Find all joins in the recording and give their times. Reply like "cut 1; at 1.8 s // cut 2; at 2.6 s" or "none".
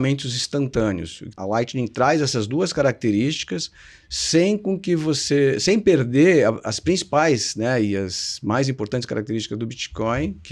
cut 1; at 1.3 s